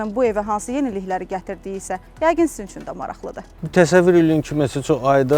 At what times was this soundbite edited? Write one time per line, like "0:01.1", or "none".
0:03.5